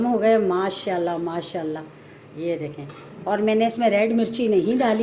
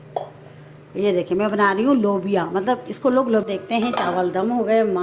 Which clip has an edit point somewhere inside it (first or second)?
second